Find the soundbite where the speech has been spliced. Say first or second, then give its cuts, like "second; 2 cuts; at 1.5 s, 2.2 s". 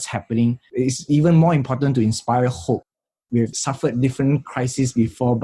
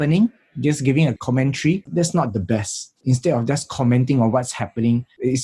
second; 2 cuts; at 1.9 s, 3.0 s